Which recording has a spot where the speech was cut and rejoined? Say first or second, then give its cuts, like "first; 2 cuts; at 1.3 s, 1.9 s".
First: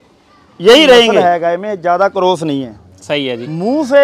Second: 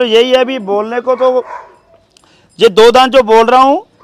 first; 1 cut; at 1.1 s